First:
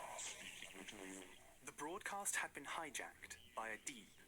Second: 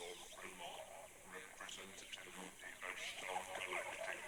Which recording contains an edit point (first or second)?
first